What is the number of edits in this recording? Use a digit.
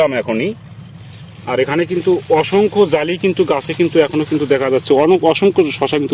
0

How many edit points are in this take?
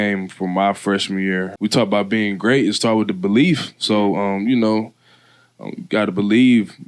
1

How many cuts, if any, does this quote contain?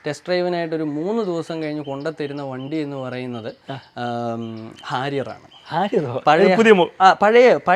0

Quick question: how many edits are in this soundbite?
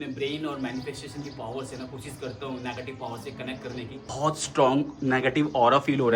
1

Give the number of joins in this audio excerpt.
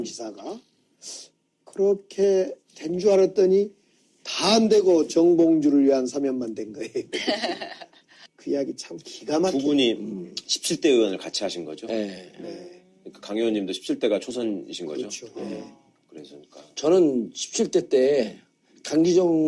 1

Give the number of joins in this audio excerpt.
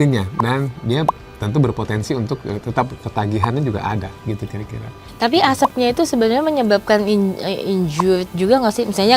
1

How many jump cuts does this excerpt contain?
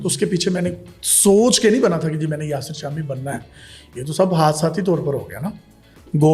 0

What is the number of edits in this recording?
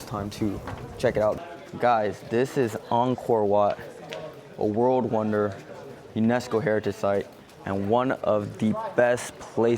1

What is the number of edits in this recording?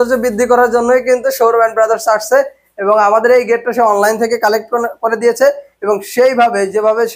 0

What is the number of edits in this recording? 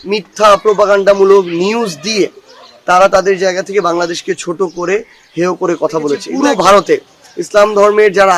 1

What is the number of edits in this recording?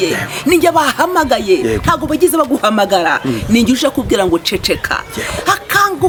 0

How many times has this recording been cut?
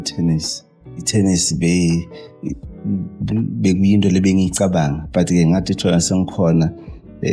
1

